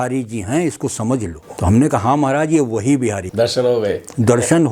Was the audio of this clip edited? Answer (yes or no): yes